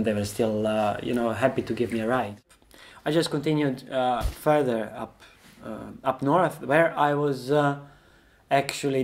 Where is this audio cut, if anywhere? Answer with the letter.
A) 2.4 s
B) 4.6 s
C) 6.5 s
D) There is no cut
A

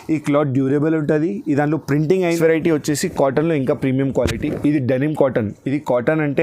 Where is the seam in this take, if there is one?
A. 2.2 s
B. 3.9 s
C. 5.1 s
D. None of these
A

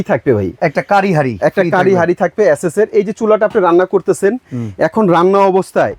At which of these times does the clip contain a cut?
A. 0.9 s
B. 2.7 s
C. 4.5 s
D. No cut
D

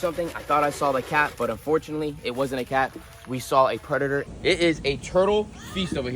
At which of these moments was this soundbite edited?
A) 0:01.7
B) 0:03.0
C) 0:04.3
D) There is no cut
C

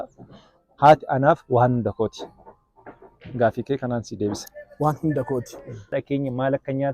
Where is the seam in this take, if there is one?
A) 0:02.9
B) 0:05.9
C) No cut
B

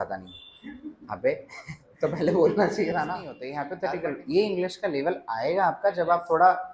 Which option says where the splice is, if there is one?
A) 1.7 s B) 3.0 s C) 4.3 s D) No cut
B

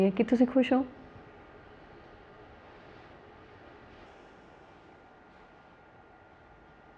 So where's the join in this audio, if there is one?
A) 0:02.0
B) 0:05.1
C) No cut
C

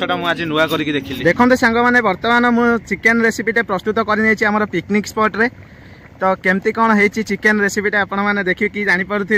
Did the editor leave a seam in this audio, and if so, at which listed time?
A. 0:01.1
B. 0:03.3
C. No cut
A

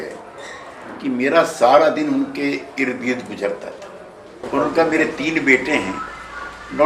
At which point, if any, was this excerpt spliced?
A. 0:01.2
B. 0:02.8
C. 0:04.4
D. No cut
C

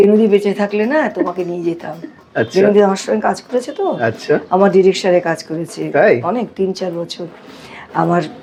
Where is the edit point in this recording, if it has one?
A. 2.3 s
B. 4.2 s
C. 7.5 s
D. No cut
D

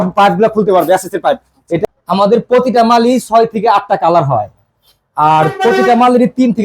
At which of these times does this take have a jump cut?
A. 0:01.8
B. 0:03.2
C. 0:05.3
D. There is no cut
A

